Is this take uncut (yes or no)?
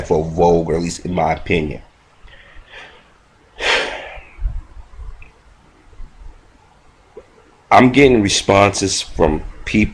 no